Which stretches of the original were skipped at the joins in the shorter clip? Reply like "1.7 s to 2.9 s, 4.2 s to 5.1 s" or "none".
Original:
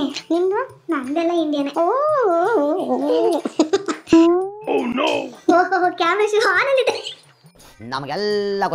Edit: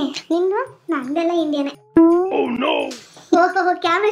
1.7 s to 3.9 s